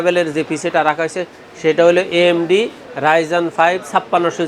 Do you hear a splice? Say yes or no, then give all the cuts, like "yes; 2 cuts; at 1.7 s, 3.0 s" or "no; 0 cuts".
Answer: no; 0 cuts